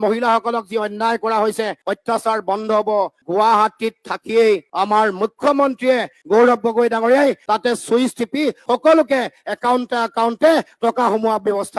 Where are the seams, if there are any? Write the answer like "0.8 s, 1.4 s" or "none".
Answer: none